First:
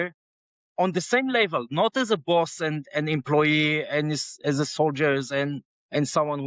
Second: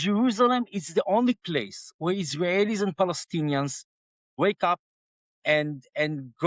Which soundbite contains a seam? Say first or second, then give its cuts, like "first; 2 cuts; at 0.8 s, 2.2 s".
second; 1 cut; at 4.3 s